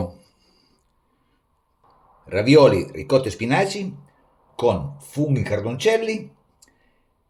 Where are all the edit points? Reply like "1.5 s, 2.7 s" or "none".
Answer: 1.8 s